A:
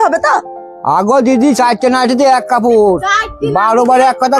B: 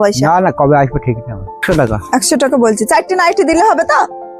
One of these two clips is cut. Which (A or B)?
B